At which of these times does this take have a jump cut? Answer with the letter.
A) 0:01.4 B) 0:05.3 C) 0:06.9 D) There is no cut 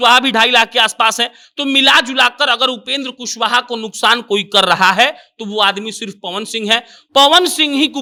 D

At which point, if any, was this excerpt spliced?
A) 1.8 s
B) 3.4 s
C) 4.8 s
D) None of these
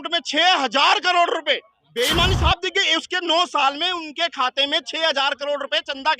A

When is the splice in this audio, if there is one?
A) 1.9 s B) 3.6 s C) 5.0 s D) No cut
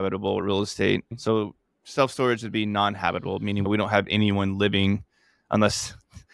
B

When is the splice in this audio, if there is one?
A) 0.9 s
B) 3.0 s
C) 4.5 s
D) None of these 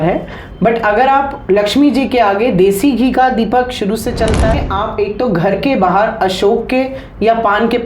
C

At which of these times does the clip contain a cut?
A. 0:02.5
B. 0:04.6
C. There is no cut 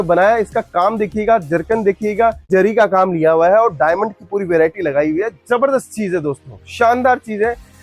A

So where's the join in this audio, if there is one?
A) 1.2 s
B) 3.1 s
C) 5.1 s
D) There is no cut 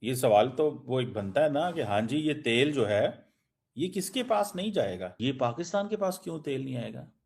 C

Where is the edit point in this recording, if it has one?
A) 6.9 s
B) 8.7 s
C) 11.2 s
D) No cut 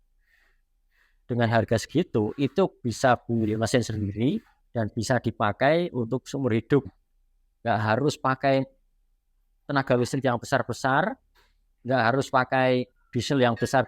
A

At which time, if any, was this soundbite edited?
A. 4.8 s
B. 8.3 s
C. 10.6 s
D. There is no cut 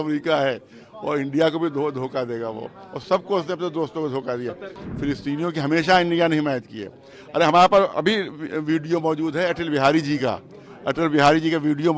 A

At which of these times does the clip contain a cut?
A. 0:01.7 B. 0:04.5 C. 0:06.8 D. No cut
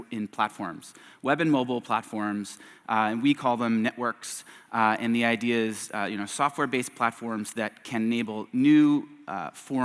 D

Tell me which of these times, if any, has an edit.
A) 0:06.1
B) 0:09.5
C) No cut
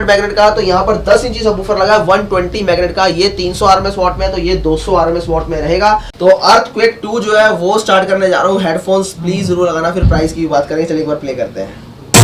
A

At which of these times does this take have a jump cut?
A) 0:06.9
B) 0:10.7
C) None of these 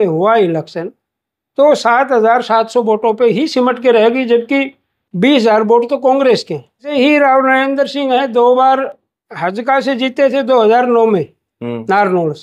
A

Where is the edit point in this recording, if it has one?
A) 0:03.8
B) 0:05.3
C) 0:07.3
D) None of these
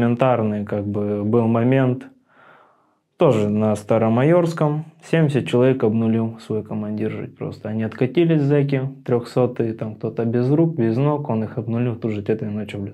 D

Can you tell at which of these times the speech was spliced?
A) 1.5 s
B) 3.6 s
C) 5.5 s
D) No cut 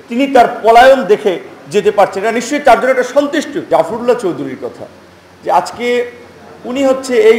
B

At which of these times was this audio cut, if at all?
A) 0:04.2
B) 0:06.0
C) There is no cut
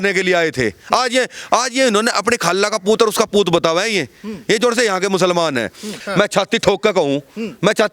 B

